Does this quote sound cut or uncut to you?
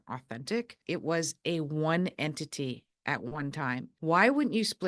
cut